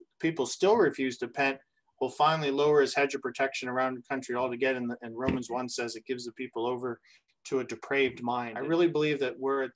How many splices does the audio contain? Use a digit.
1